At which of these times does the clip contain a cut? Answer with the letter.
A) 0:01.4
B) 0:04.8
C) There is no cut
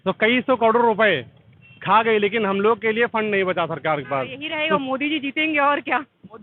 B